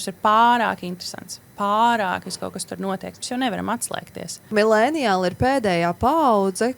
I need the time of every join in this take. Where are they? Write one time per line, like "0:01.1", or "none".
0:04.4